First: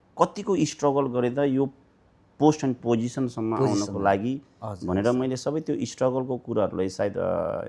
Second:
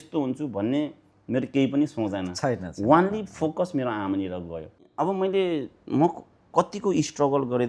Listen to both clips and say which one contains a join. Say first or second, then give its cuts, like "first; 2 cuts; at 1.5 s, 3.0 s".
second; 1 cut; at 4.9 s